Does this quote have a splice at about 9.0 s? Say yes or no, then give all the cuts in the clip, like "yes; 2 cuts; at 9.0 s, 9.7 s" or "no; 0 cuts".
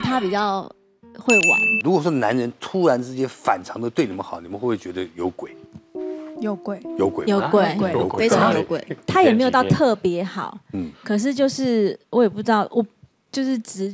yes; 2 cuts; at 1.8 s, 9.0 s